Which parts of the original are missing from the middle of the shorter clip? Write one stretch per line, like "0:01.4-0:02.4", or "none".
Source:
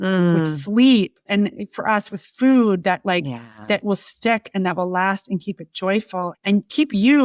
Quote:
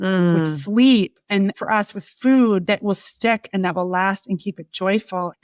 0:01.3-0:01.5
0:02.8-0:03.6

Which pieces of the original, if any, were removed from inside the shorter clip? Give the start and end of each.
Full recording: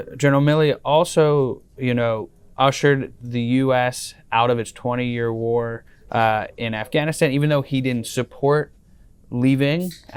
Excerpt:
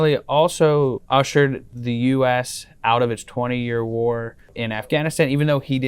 0:01.6-0:02.5
0:06.0-0:06.5

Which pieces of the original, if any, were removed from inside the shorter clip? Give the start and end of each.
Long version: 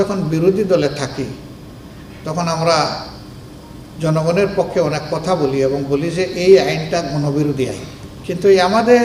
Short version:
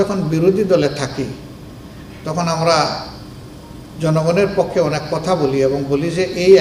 none

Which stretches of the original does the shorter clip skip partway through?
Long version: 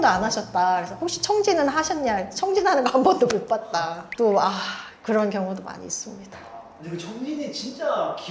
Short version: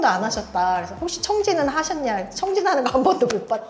none

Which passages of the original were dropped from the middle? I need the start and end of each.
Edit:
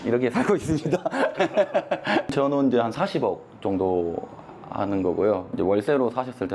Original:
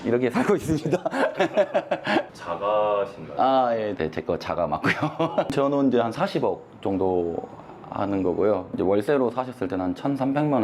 0:02.3-0:05.5

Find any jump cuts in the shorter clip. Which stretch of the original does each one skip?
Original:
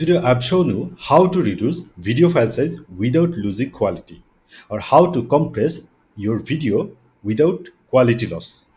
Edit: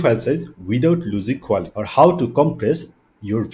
0:04.1-0:04.7

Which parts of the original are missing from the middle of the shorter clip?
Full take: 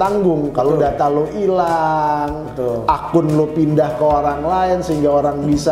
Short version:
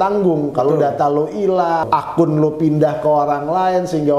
0:01.8-0:02.8

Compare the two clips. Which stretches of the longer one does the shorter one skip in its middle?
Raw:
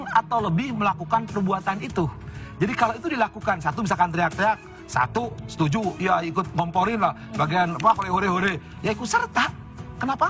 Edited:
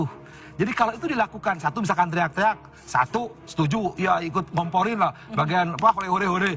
none

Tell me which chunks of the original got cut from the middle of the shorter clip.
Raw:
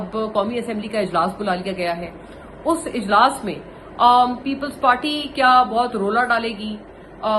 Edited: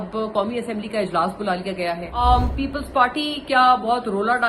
0:02.2-0:04.1

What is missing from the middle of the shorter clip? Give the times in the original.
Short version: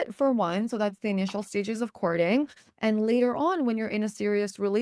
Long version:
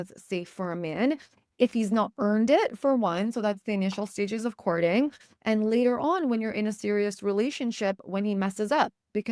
none

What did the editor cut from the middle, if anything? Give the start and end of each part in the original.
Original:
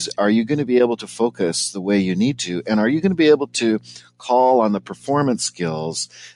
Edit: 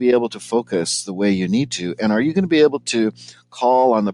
none

